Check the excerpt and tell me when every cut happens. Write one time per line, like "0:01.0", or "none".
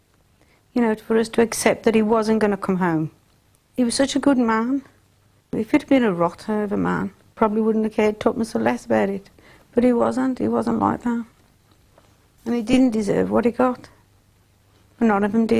0:03.6
0:05.5
0:07.3

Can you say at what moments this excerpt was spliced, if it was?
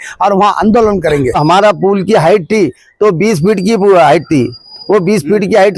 0:01.4

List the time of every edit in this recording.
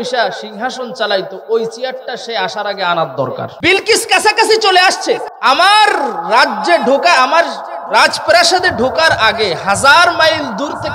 0:03.5
0:05.3

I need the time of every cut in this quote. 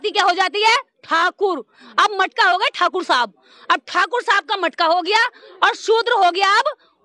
none

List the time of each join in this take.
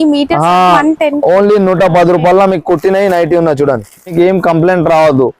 0:00.8
0:04.1

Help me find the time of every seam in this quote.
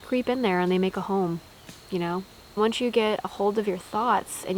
0:02.6

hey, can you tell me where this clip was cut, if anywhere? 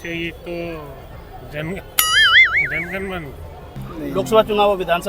0:03.7

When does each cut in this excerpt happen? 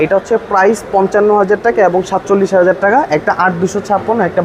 none

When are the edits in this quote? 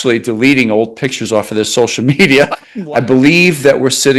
0:02.6

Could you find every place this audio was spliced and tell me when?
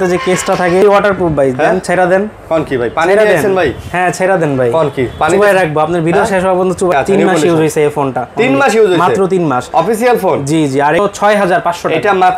0:00.8
0:06.9
0:11.0

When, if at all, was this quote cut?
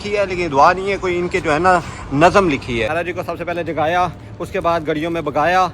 0:02.9

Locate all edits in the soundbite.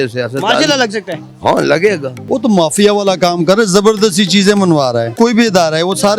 0:02.1
0:05.1

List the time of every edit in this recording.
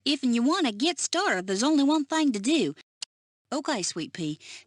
0:02.9

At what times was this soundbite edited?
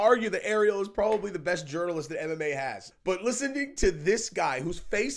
0:02.9

